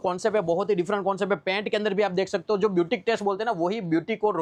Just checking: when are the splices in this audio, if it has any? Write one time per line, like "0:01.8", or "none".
none